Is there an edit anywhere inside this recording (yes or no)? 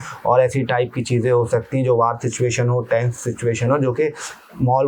no